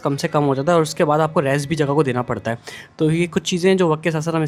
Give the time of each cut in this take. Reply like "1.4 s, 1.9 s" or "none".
none